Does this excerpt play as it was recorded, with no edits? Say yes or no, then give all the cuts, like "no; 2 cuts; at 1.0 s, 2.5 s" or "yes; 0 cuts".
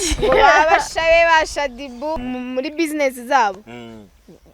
no; 1 cut; at 2.2 s